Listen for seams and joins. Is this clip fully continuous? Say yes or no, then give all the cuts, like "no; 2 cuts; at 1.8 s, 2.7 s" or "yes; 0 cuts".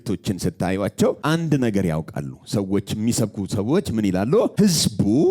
no; 2 cuts; at 1.2 s, 4.5 s